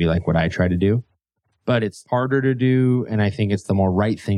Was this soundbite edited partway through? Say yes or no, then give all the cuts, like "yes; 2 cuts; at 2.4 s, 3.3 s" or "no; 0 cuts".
yes; 1 cut; at 2.0 s